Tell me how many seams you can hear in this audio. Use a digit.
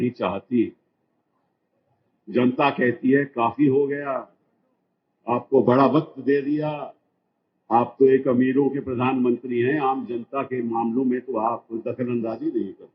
0